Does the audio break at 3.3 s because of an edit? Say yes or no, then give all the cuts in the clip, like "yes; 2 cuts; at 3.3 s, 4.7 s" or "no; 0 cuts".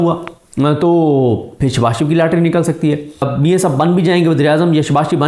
yes; 1 cut; at 3.3 s